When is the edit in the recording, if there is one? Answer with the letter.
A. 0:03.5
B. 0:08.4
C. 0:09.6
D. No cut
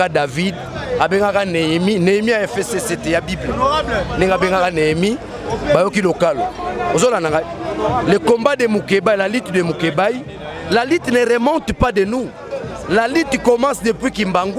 D